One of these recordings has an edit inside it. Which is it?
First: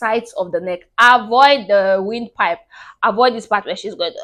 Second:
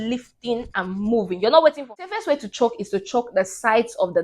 second; 1 cut; at 1.9 s

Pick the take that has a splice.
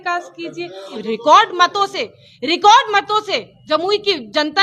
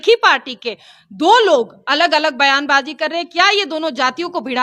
first; 1 cut; at 1.0 s

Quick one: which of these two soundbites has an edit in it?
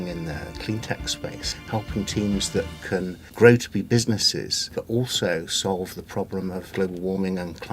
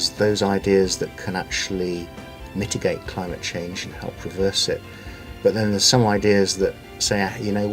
first; 4 cuts; at 1.5 s, 3.2 s, 4.8 s, 6.7 s

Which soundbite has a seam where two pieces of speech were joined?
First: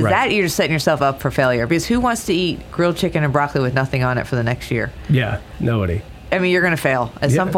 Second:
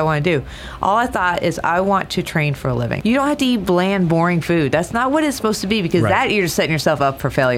second; 1 cut; at 2.9 s

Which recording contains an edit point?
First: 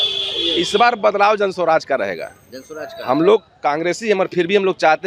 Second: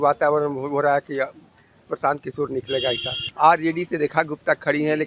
second; 1 cut; at 3.2 s

